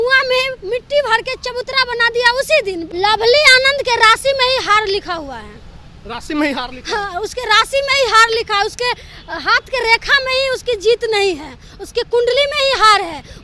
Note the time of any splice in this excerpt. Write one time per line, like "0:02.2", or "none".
0:02.8